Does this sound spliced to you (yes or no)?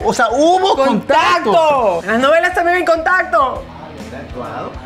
yes